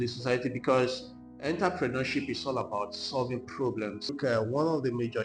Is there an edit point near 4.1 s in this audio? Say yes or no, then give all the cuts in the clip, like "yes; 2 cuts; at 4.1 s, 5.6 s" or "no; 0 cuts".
yes; 1 cut; at 4.1 s